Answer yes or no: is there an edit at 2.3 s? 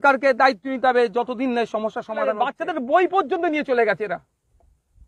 yes